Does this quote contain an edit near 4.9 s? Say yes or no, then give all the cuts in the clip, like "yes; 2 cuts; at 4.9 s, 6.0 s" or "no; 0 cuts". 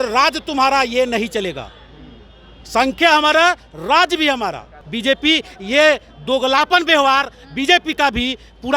yes; 1 cut; at 4.9 s